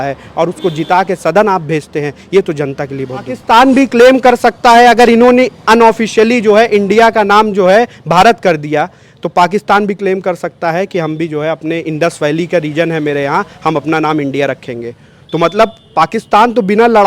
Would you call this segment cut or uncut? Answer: cut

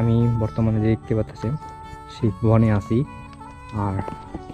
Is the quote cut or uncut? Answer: uncut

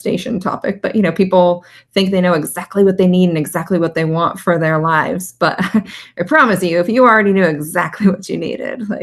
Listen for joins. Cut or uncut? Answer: uncut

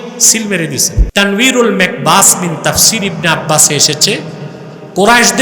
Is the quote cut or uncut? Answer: cut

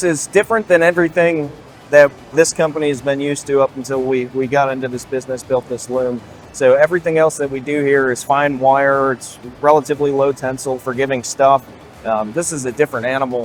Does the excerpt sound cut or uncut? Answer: uncut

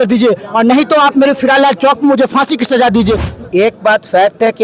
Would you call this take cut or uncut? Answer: cut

